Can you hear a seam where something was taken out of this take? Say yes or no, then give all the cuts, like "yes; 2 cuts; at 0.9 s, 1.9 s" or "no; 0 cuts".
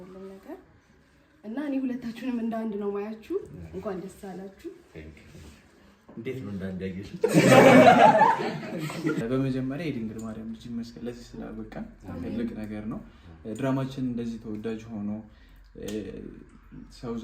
yes; 1 cut; at 9.2 s